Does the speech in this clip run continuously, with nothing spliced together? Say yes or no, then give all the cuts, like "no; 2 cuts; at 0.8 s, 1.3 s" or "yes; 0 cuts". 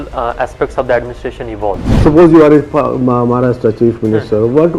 no; 1 cut; at 1.9 s